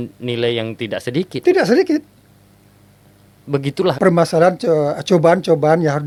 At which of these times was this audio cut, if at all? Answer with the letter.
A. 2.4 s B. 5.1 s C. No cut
C